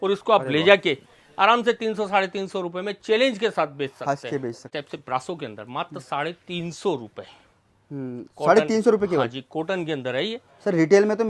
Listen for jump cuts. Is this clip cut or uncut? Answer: cut